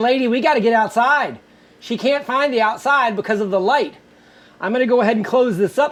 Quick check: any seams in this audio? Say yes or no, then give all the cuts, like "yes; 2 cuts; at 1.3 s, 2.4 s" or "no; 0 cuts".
no; 0 cuts